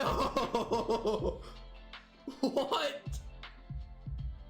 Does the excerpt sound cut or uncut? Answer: cut